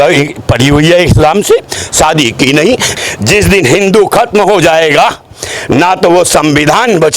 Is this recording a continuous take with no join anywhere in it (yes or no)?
no